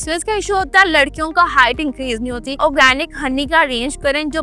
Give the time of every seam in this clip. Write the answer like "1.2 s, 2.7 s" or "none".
2.6 s